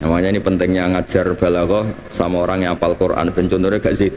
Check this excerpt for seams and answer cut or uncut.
uncut